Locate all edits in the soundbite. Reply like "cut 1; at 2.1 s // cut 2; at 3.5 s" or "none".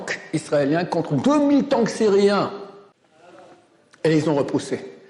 none